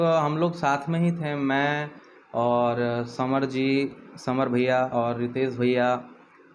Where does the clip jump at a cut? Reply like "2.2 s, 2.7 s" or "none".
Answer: none